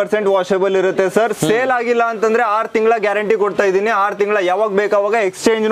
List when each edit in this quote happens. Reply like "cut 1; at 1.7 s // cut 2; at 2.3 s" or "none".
none